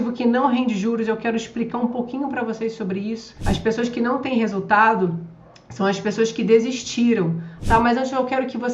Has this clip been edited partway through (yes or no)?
yes